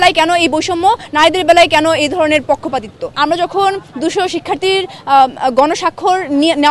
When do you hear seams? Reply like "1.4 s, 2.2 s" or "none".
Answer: none